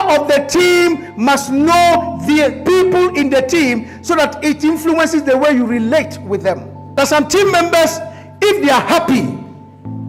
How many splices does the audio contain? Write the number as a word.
zero